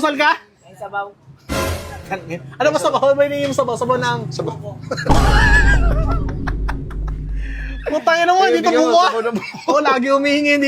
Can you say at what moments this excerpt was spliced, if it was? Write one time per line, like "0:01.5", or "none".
none